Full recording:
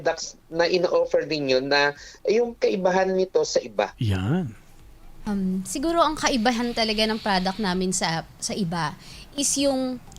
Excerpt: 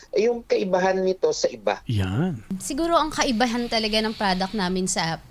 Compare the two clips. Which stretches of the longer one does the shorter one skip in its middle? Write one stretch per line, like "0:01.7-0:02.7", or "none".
0:04.7-0:05.6